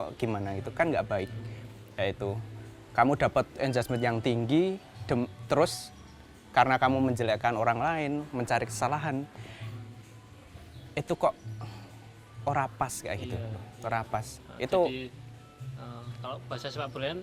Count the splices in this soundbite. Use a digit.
0